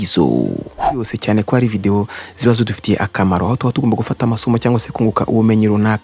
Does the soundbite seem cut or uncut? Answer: cut